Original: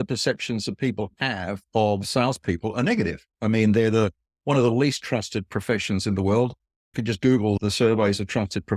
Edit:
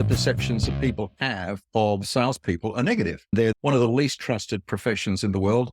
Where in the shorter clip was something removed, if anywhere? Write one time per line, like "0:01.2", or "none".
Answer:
0:03.4